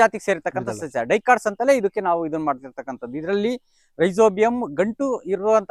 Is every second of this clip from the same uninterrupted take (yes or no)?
yes